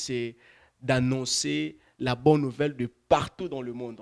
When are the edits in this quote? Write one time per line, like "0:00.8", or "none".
none

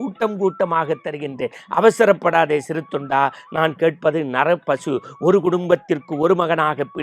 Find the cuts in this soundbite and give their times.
none

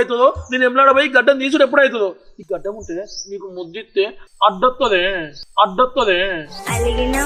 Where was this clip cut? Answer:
none

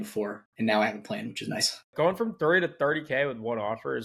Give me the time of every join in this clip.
0:01.9

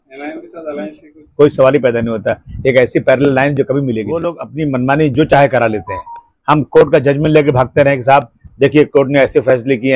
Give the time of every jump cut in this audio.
0:04.4

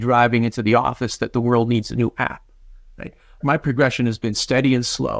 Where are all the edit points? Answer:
0:03.4

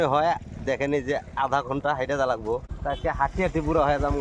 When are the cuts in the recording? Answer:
0:02.7

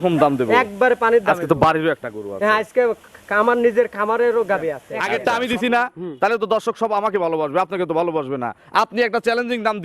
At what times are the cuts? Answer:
0:04.9

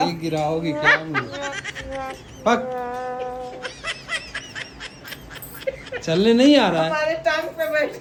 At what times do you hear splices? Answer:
none

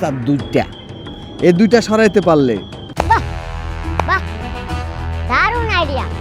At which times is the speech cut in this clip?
0:02.8

